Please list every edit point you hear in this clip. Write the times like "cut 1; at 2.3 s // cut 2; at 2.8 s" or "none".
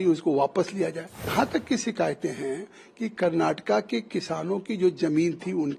cut 1; at 1.3 s